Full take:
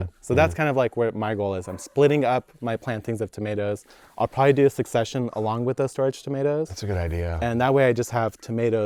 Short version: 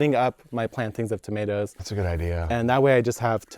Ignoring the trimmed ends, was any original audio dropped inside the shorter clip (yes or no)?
yes